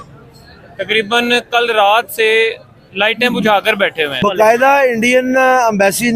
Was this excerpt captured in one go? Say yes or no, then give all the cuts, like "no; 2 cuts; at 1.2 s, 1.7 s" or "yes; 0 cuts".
no; 1 cut; at 4.2 s